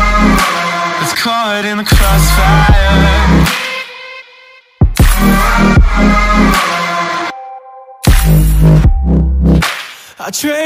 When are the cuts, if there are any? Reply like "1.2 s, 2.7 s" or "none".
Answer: 1.0 s